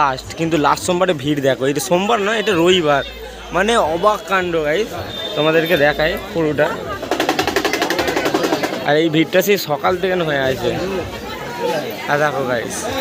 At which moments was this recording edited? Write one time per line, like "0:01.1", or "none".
none

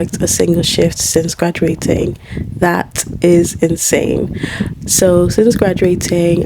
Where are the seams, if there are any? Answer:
none

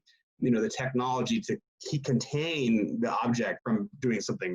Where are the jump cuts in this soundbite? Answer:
0:03.6

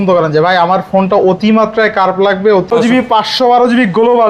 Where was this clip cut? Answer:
0:02.7

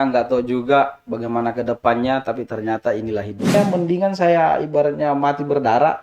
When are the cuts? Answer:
0:03.5

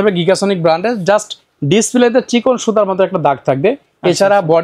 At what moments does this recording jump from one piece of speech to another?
none

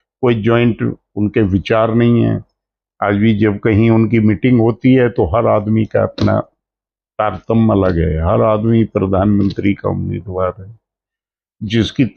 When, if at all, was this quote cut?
none

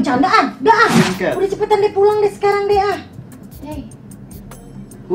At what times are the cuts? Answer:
0:01.2

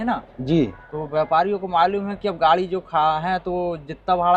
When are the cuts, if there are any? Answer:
none

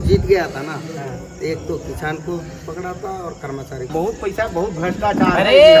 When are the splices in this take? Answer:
0:03.9

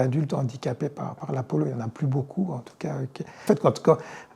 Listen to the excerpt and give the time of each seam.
none

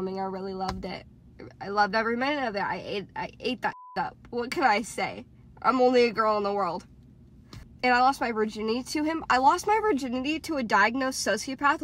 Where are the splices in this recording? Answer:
0:07.2

